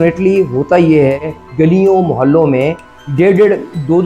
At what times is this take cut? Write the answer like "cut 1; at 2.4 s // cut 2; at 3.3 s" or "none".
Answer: cut 1; at 1.5 s